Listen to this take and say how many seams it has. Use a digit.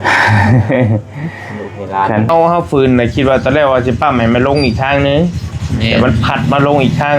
1